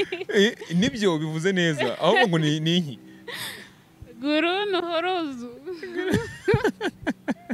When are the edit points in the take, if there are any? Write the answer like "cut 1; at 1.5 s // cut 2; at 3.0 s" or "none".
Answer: none